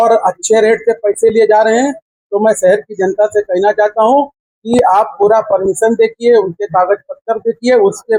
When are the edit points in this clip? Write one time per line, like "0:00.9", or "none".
none